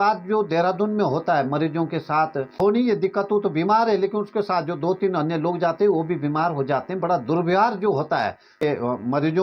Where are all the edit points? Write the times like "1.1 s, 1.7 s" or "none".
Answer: 2.6 s, 8.6 s